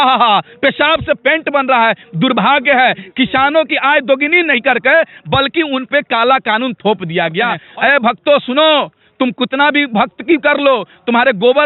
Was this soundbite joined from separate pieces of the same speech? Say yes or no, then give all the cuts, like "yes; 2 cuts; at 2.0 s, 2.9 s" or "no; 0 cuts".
yes; 1 cut; at 7.6 s